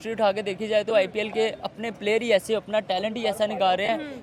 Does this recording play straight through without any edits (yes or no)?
yes